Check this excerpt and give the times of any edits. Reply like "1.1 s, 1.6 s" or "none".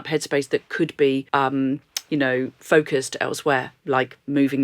1.3 s, 2.6 s